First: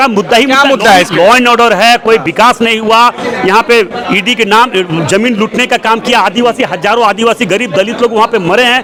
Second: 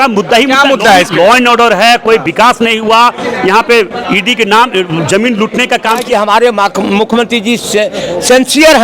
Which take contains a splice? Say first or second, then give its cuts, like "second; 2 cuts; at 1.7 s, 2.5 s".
second; 1 cut; at 6.1 s